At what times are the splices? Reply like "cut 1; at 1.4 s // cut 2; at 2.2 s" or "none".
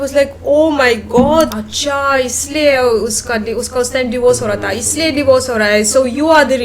cut 1; at 1.5 s